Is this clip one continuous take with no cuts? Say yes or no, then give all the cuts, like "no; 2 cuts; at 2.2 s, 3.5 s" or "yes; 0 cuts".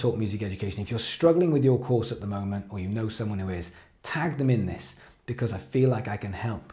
yes; 0 cuts